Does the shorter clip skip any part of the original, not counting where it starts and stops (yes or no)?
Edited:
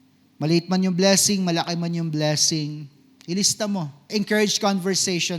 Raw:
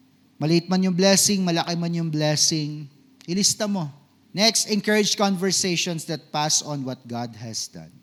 yes